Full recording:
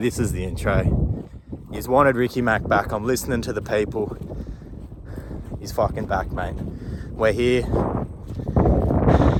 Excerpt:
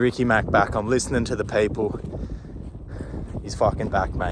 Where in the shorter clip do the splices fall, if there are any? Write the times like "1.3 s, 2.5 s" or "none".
none

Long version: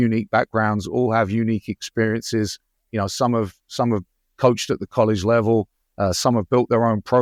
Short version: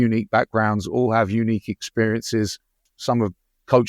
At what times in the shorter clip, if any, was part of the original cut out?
2.8 s

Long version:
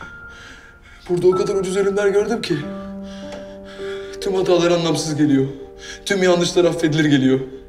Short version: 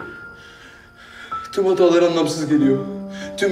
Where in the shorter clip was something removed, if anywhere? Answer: none

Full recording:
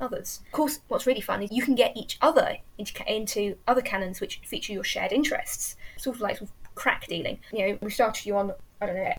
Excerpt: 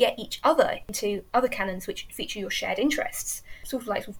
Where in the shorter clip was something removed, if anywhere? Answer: 0.9 s

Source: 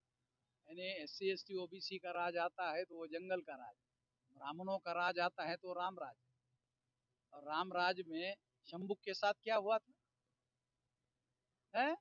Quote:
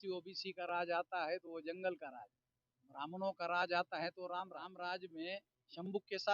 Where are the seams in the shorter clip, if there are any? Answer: 4.7 s

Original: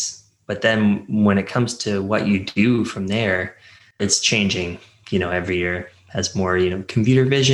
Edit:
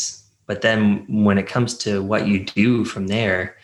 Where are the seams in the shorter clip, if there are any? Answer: none

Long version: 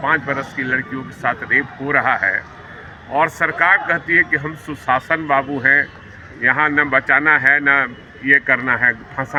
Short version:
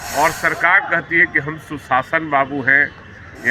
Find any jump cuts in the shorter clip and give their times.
none

